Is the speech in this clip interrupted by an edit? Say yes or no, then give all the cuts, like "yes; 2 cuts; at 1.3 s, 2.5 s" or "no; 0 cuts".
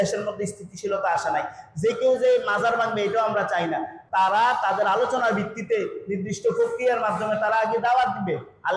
yes; 1 cut; at 4.0 s